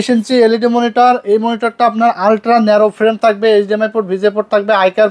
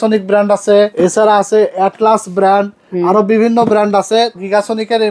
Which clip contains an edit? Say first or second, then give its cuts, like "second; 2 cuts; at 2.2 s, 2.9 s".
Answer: second; 2 cuts; at 0.9 s, 4.4 s